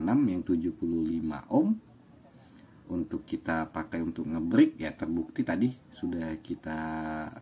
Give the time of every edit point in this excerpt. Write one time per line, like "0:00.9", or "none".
none